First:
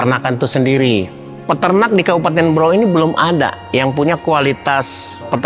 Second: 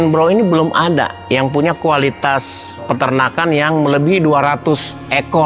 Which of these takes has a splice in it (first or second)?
first